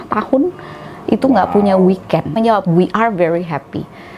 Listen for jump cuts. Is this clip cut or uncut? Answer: cut